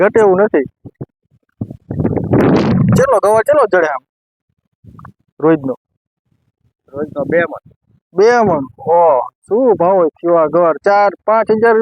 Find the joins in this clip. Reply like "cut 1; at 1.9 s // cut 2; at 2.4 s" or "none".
none